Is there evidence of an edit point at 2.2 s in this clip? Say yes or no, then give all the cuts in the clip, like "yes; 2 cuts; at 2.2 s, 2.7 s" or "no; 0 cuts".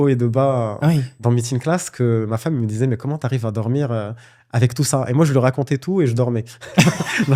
no; 0 cuts